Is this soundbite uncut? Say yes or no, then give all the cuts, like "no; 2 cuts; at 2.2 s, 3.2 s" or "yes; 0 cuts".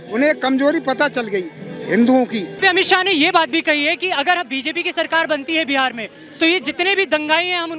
no; 1 cut; at 2.6 s